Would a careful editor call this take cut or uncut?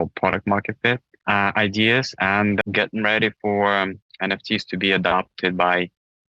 cut